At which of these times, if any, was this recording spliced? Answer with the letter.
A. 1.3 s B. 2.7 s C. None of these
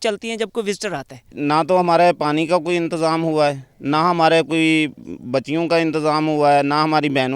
A